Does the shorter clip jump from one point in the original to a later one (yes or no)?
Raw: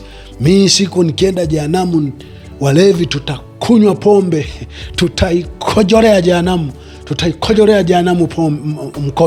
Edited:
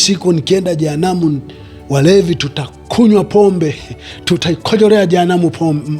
yes